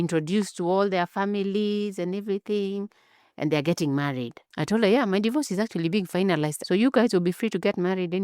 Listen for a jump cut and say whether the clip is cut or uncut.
cut